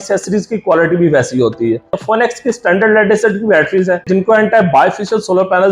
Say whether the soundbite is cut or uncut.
cut